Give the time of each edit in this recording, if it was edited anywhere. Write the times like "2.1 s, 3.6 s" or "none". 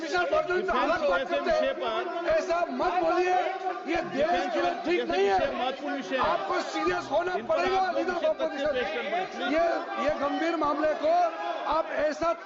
none